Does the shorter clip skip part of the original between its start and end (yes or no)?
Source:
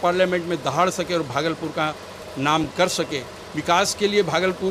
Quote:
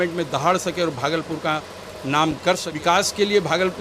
yes